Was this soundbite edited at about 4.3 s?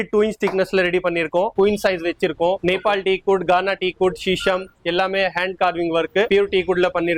no; 3 cuts; at 1.5 s, 2.6 s, 6.3 s

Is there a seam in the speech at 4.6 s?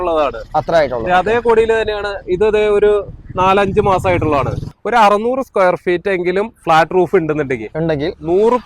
yes; 1 cut; at 4.6 s

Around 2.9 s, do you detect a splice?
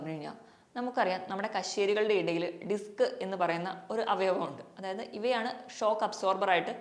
no; 0 cuts

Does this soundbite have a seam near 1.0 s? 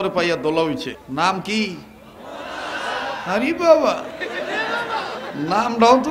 yes; 1 cut; at 1.0 s

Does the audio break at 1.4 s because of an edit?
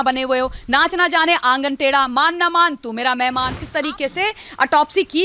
no; 1 cut; at 3.6 s

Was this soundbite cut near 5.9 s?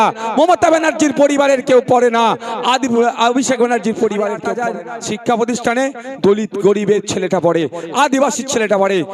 no; 1 cut; at 4.5 s

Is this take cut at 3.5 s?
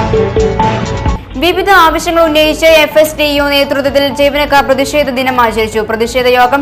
no; 1 cut; at 1.1 s

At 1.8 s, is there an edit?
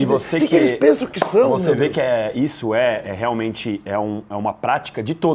no; 0 cuts

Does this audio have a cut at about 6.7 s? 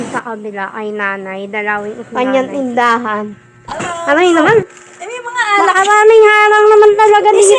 no; 2 cuts; at 2.0 s, 3.9 s

